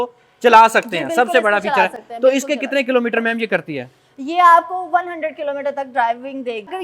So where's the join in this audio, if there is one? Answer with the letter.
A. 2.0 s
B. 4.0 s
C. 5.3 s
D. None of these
D